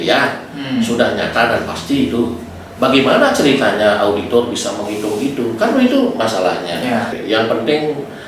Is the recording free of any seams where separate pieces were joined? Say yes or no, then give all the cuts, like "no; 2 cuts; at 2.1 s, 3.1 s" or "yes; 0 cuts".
no; 1 cut; at 7.2 s